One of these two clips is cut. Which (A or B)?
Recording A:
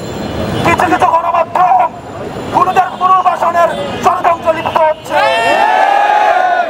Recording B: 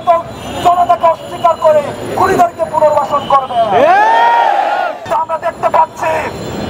B